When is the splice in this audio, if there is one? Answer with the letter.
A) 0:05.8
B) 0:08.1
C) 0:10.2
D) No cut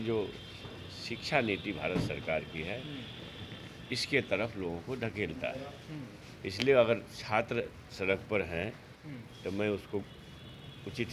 D